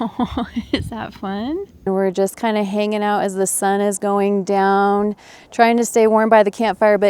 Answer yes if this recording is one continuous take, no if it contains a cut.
yes